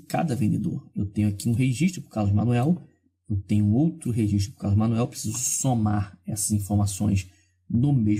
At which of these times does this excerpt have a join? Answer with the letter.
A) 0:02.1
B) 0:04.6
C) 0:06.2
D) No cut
D